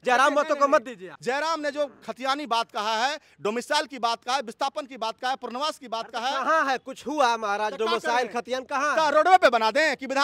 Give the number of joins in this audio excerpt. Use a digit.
1